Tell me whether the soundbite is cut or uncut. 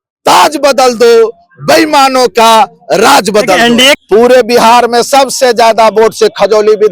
cut